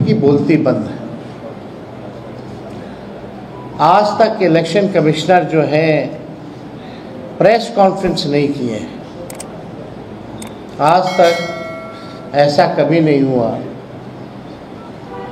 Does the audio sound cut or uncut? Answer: uncut